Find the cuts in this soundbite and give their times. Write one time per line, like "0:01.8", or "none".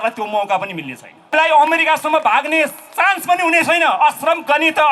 0:01.2